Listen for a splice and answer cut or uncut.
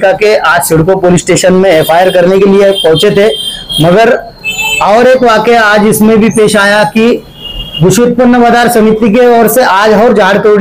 uncut